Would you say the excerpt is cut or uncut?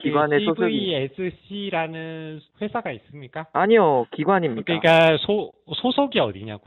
uncut